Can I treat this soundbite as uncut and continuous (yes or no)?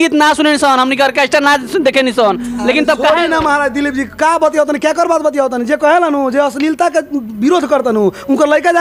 yes